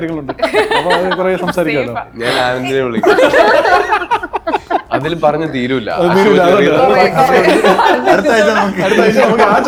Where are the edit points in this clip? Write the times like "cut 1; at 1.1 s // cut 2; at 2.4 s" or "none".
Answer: none